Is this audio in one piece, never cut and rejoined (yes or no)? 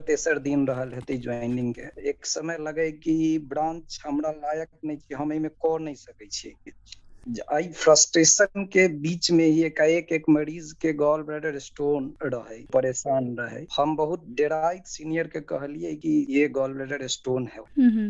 no